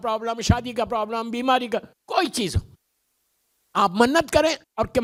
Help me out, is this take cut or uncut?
uncut